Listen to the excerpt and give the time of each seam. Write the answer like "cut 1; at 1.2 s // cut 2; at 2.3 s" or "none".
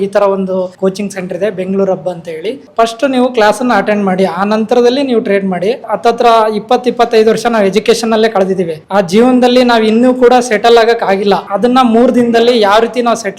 cut 1; at 2.6 s // cut 2; at 5.8 s // cut 3; at 8.8 s // cut 4; at 11.5 s